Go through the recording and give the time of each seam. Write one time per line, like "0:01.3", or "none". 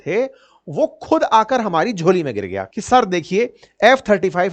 0:02.6